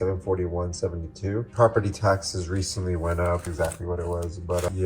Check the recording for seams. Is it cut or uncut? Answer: cut